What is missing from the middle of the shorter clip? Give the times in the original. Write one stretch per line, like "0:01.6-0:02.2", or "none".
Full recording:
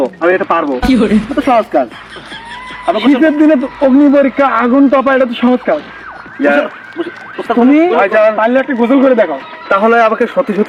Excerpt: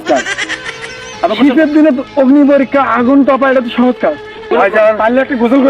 0:06.2-0:07.9